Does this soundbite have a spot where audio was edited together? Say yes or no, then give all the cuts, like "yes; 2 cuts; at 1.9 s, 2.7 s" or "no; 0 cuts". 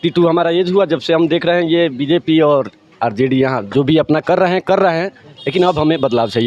no; 0 cuts